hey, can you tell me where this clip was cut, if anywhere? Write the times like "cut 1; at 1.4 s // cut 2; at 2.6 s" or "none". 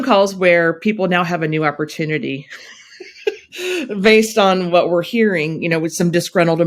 none